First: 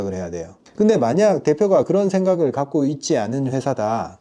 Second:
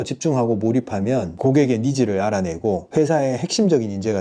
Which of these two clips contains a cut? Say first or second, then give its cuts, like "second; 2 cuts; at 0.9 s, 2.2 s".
second; 2 cuts; at 1.3 s, 2.8 s